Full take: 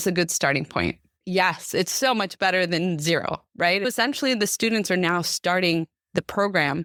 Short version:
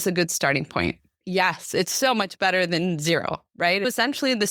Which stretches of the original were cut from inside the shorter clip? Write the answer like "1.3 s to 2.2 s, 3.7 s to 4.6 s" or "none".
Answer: none

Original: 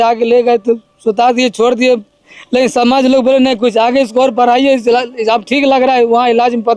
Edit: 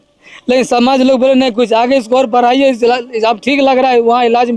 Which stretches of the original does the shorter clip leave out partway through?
none

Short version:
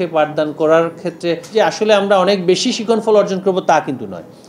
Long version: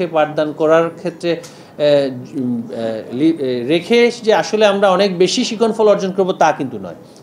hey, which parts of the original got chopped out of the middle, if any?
1.5 s to 4.2 s

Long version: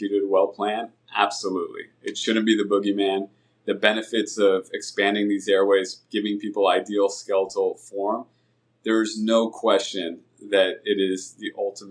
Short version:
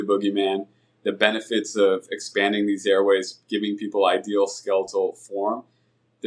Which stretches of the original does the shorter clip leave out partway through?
none

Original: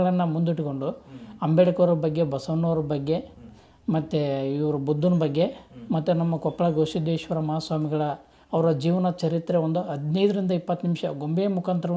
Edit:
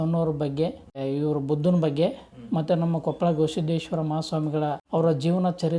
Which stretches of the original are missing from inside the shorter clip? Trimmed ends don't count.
3.5 s to 4.4 s, 8.2 s to 8.4 s

